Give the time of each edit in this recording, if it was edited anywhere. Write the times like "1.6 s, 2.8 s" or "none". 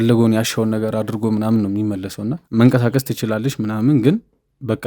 2.4 s